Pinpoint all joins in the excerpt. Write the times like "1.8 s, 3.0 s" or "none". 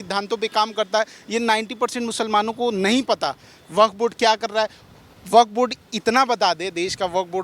none